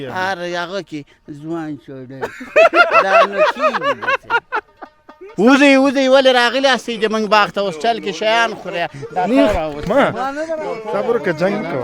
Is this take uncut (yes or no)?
no